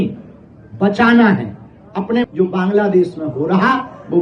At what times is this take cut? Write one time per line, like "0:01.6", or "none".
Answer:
0:02.2